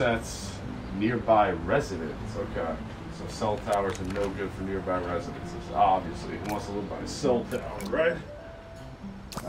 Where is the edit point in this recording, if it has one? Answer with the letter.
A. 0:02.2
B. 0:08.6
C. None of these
C